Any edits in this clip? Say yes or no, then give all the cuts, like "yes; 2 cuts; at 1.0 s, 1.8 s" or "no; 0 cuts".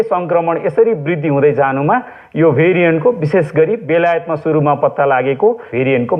no; 0 cuts